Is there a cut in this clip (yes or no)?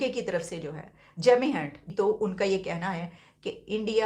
yes